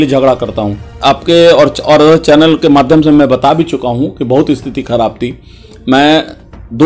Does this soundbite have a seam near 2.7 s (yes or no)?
no